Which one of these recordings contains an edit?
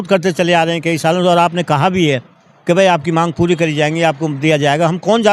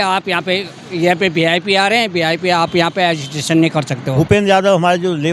second; 1 cut; at 4.1 s

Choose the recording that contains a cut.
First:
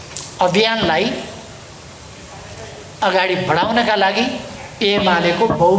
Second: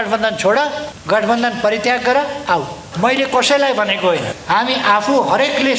second; 3 cuts; at 0.9 s, 2.8 s, 4.3 s

